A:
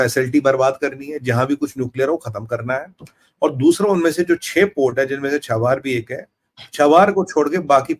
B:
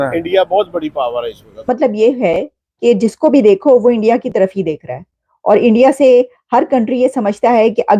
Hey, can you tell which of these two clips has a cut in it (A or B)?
B